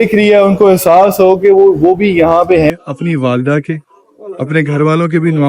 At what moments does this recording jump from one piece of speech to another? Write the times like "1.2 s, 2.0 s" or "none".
2.7 s

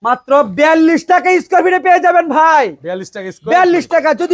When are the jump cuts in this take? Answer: none

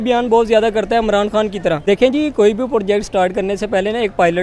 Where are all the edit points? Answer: 1.8 s

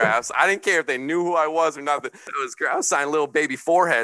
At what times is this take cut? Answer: 2.4 s

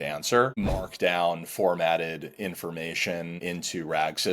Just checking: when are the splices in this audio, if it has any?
0.9 s, 3.4 s

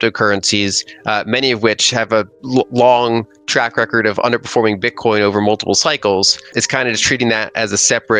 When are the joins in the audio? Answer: 2.4 s, 6.5 s

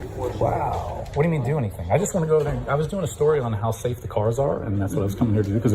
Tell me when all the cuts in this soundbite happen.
none

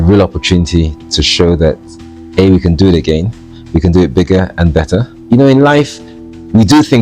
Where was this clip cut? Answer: 5.2 s

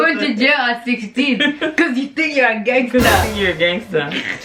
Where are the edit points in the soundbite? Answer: none

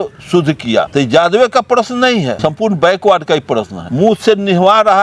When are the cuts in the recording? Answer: 0.9 s, 2.3 s, 3.8 s

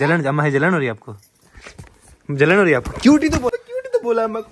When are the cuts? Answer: 3.6 s

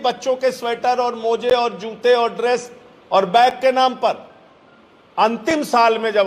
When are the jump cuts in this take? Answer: none

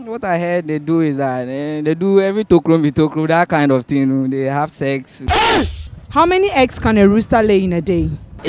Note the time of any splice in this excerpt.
5.9 s

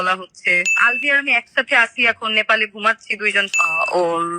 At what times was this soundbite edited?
0.8 s, 3.5 s

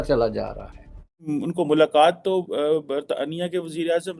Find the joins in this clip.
1.1 s

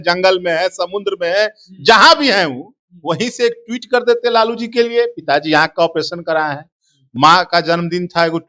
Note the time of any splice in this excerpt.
none

